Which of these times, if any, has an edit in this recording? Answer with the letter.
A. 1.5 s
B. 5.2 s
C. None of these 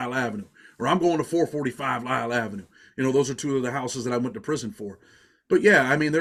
C